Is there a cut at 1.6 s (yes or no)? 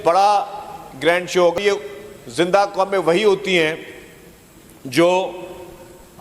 yes